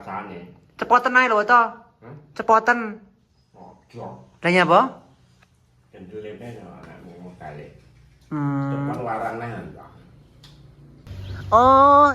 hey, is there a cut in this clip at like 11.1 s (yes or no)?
yes